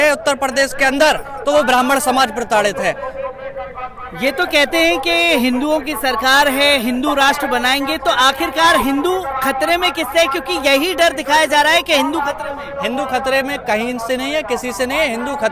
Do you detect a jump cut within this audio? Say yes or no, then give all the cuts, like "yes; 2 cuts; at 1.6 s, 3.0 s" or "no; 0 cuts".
no; 0 cuts